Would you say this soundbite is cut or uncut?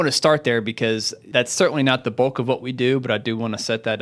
cut